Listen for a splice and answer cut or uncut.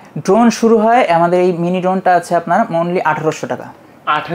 uncut